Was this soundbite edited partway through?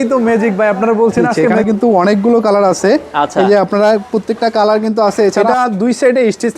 yes; 2 cuts; at 1.5 s, 5.4 s

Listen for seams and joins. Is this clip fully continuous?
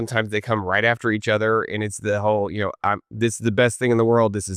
yes; 0 cuts

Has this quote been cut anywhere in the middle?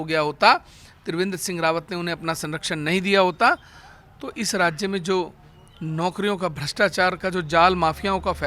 no; 0 cuts

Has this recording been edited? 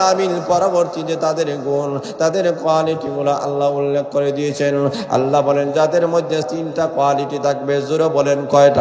yes; 1 cut; at 6.5 s

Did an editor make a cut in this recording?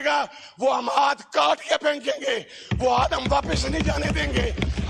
no; 0 cuts

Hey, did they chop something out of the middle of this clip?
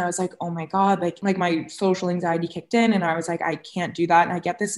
yes; 1 cut; at 1.2 s

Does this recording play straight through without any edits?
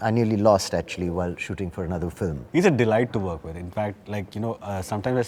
no; 1 cut; at 2.4 s

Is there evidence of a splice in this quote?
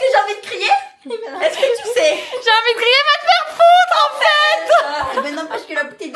no; 0 cuts

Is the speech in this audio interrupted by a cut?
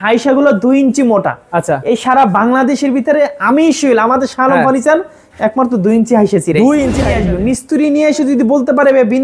yes; 1 cut; at 7.1 s

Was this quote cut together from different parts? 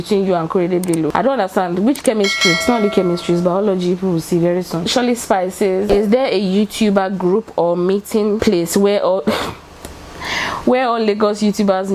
no; 0 cuts

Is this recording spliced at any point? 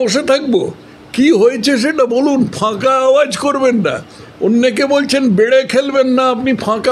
no; 0 cuts

